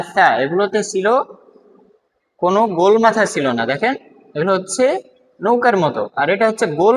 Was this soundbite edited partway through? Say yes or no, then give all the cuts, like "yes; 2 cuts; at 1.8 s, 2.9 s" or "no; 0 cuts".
no; 0 cuts